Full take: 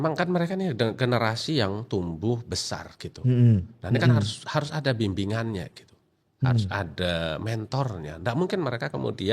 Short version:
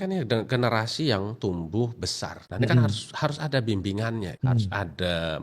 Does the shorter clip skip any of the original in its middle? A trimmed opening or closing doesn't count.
yes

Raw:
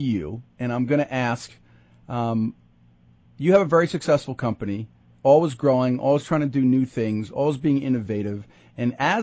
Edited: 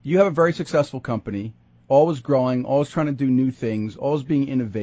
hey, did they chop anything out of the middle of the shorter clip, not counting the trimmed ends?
no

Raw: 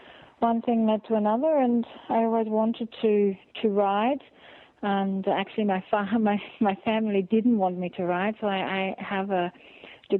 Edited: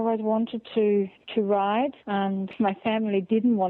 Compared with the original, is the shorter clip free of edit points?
no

